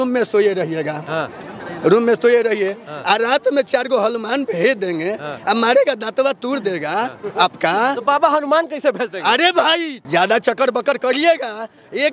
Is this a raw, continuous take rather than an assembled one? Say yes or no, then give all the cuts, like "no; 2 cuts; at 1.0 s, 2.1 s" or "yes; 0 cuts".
no; 1 cut; at 9.9 s